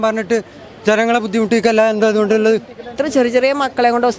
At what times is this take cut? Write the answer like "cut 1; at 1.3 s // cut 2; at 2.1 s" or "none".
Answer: cut 1; at 3.0 s